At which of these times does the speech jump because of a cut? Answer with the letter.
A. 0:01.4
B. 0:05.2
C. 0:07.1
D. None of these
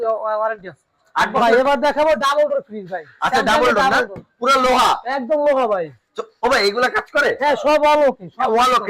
A